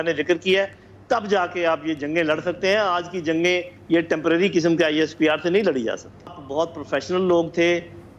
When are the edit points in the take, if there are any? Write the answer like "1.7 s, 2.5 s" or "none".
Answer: 6.3 s